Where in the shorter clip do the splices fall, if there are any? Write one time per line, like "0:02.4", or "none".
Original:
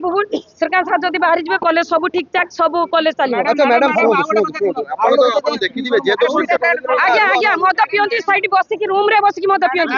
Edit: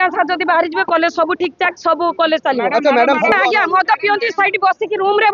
0:03.3